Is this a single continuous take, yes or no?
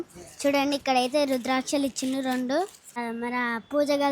no